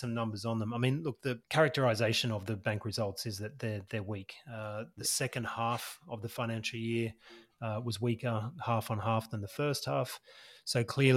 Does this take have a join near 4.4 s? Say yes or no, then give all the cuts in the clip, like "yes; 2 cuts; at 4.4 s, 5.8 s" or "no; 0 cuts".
no; 1 cut; at 1.4 s